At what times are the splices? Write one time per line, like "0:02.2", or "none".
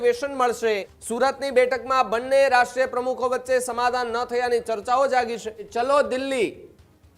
0:01.0
0:05.6